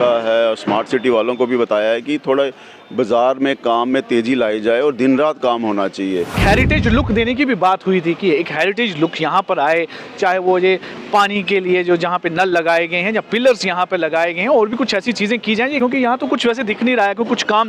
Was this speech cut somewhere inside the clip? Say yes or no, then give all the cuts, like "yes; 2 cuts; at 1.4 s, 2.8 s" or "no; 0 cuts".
yes; 2 cuts; at 6.4 s, 15.8 s